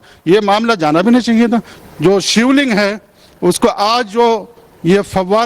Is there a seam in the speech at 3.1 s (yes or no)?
no